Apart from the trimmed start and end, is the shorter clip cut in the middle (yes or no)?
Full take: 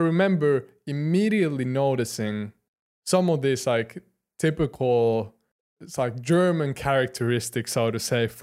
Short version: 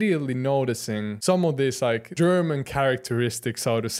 yes